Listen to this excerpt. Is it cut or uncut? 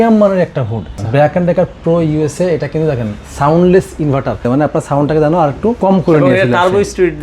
cut